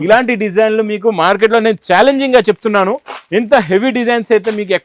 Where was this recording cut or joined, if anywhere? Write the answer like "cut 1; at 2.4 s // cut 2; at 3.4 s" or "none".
none